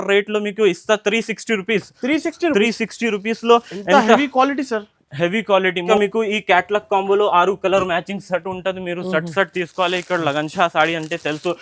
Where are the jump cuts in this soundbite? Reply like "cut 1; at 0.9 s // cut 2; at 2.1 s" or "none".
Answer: cut 1; at 5.9 s

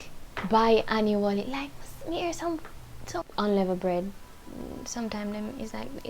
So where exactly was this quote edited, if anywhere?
cut 1; at 3.2 s

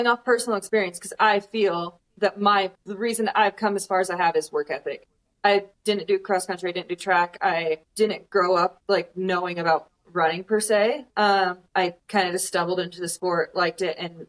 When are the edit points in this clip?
cut 1; at 2.8 s // cut 2; at 7.9 s // cut 3; at 8.8 s // cut 4; at 11.6 s

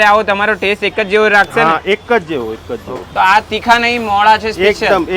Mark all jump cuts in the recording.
cut 1; at 3.0 s

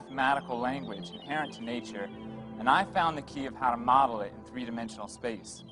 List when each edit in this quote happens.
none

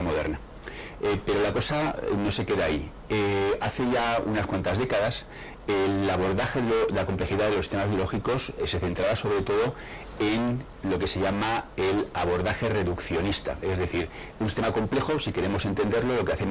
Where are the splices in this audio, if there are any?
none

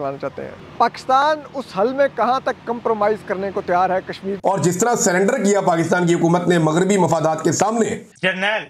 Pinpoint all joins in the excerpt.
none

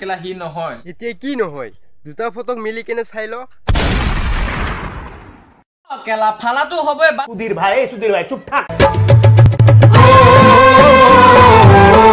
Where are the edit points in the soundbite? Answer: none

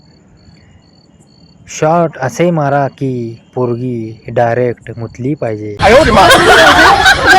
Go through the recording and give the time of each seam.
cut 1; at 5.5 s

